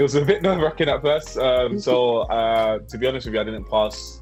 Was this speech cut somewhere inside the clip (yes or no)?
no